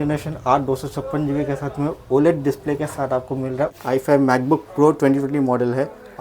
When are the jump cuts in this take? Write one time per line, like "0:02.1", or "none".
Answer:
0:03.8